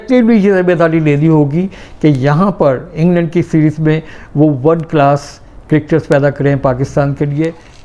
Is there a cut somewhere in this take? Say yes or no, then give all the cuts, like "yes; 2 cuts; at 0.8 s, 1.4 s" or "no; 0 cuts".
no; 0 cuts